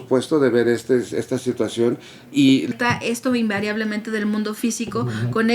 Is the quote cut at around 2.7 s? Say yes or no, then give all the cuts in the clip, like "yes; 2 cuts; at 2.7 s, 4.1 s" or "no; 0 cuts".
yes; 1 cut; at 2.7 s